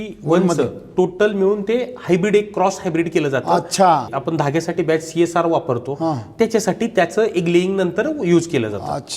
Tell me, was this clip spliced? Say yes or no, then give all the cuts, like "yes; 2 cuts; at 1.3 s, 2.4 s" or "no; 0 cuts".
yes; 1 cut; at 4.1 s